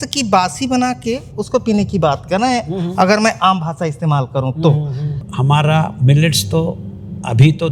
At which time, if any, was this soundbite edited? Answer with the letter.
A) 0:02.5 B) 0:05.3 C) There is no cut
B